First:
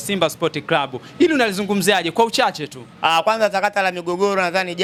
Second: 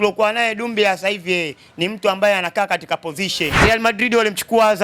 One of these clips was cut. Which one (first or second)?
second